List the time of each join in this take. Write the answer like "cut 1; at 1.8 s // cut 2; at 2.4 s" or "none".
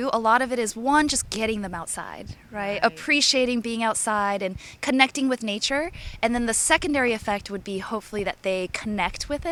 none